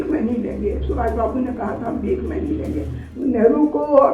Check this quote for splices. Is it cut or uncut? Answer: cut